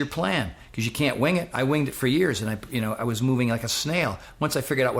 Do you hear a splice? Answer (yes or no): no